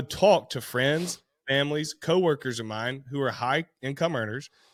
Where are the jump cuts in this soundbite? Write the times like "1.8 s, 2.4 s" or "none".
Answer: none